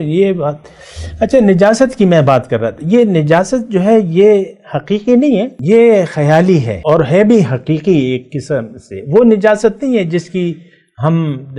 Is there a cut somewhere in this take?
yes; 2 cuts; at 5.5 s, 6.7 s

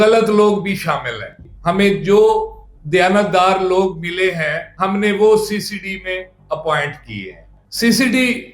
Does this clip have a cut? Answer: yes; 2 cuts; at 1.4 s, 7.5 s

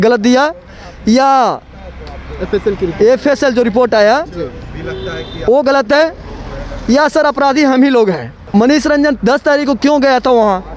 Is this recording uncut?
no; 1 cut; at 8.3 s

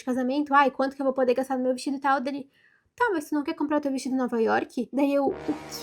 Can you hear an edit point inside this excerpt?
no; 0 cuts

